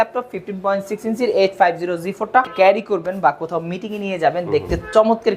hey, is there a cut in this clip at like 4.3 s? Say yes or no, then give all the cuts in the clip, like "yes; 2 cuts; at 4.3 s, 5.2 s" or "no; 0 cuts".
no; 1 cut; at 2.5 s